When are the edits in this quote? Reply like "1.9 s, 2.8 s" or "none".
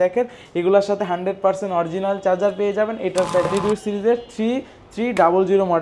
3.5 s